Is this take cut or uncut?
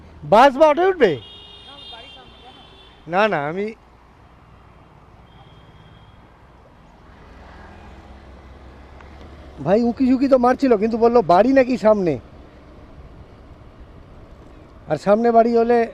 uncut